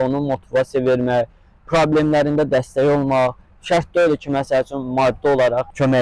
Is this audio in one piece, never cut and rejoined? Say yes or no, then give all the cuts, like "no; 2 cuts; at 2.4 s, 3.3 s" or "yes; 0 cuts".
yes; 0 cuts